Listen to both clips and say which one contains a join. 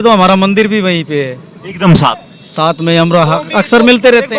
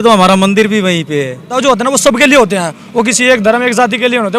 second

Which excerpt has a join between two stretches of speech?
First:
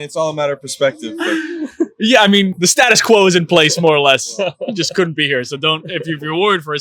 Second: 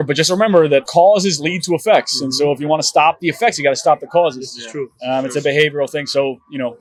first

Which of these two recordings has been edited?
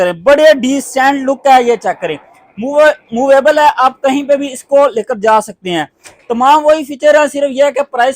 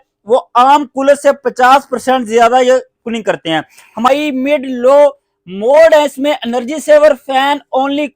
second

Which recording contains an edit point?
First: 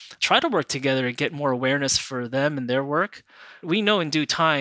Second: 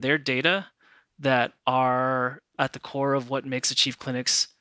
first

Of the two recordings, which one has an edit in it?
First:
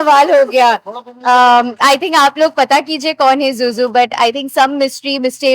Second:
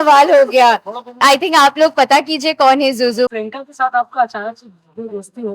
second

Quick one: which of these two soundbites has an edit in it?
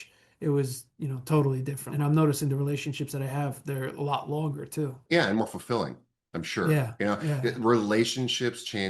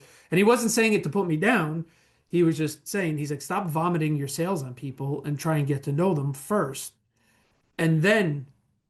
first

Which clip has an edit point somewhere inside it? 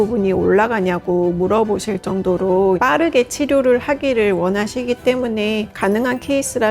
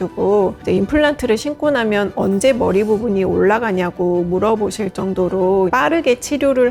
first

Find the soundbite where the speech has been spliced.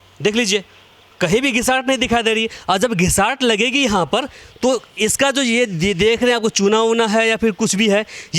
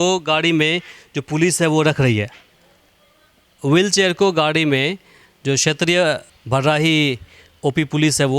second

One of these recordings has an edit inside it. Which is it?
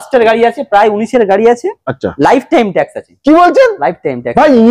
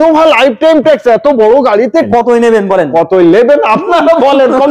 second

